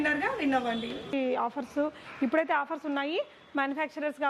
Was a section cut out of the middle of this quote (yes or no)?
yes